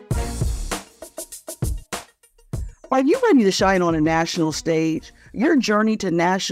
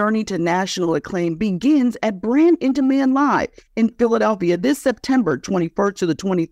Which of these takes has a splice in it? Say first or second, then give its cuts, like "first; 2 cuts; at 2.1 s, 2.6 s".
first; 2 cuts; at 0.8 s, 2.7 s